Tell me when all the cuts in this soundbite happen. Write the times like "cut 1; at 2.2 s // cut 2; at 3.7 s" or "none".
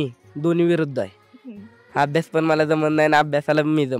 none